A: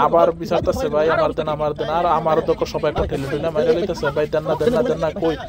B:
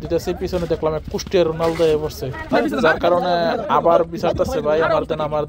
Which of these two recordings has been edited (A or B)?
B